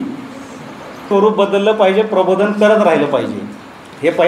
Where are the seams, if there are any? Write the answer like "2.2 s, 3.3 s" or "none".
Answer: 1.1 s